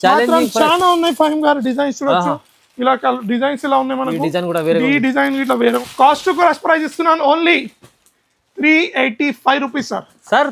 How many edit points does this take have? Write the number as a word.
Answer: one